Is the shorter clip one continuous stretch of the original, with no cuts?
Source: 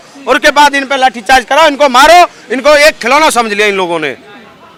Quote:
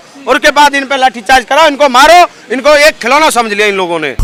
yes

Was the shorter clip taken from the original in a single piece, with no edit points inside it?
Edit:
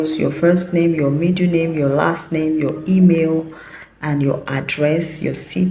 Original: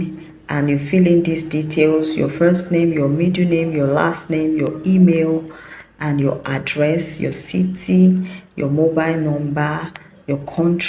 yes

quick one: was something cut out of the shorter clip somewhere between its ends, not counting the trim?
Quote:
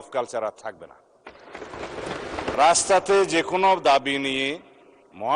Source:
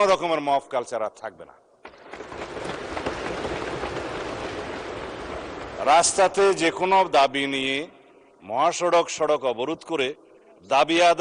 yes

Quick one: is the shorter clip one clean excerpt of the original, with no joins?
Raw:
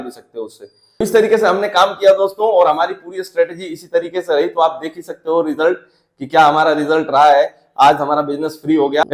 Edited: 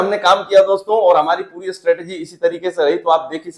yes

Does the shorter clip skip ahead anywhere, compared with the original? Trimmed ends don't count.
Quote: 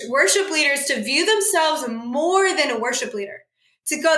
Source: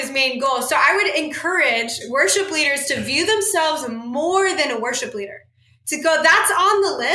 no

